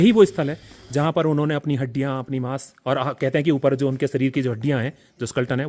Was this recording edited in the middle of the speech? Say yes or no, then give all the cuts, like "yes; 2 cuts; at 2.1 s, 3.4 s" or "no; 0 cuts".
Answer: no; 0 cuts